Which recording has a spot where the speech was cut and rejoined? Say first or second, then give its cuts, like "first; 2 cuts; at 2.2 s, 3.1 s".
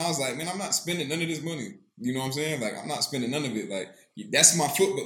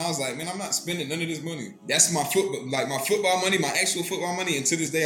second; 1 cut; at 1.7 s